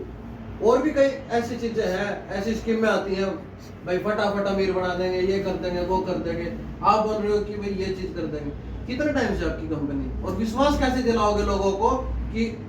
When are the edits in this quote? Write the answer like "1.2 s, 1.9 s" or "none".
none